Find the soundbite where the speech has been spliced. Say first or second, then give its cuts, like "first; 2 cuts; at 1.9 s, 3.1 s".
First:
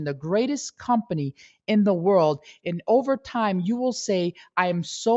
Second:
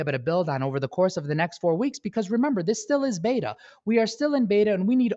second; 1 cut; at 3.8 s